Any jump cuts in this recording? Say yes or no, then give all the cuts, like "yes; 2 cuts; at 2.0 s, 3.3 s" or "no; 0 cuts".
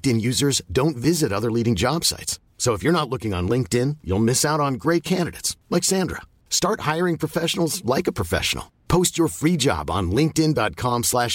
no; 0 cuts